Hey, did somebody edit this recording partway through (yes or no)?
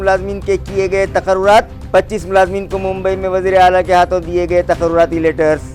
no